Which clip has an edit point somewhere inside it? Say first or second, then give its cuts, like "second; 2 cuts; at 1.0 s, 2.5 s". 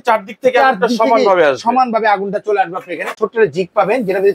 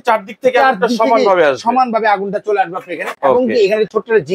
first; 1 cut; at 3.2 s